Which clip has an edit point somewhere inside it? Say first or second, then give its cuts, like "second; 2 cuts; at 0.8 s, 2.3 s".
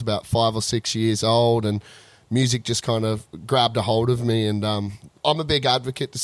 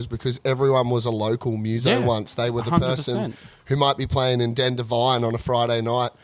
first; 1 cut; at 5.1 s